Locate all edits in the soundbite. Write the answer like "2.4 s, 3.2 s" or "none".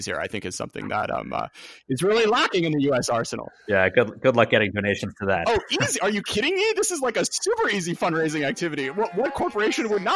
none